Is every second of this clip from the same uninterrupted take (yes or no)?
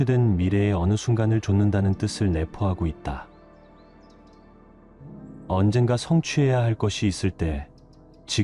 yes